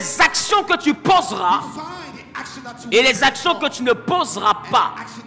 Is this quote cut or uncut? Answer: uncut